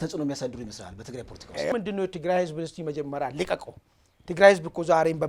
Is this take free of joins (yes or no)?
no